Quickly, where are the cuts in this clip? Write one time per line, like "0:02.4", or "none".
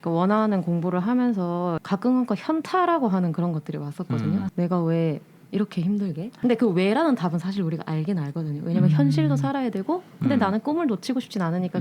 0:01.8
0:04.5
0:06.3

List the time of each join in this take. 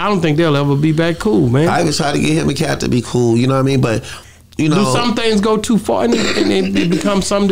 none

